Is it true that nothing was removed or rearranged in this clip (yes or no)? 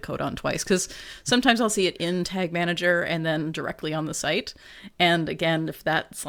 yes